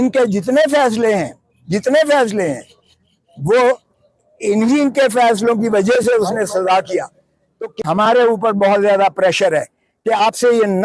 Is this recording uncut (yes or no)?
no